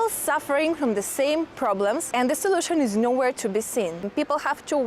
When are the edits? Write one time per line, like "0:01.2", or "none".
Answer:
0:02.0
0:04.1